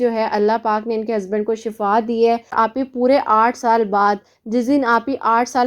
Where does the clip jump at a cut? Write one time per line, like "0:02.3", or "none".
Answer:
0:02.5

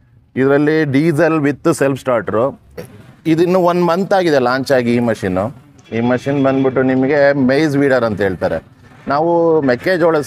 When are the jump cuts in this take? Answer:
0:02.8

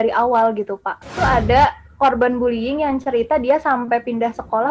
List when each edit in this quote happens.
0:01.1

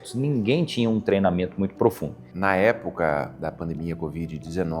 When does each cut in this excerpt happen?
0:02.4

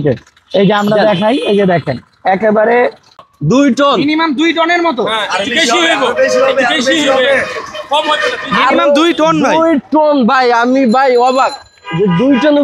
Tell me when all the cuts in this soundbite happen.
0:03.3

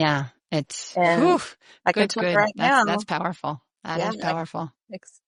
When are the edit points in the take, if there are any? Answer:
none

